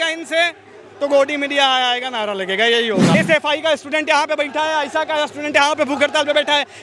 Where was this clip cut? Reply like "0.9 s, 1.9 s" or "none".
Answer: 3.1 s